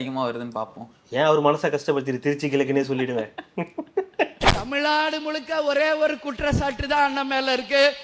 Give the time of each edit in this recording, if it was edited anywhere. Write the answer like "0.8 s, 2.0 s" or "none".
4.5 s